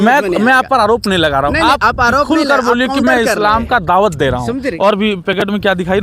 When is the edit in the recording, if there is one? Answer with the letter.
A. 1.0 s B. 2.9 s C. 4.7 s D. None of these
C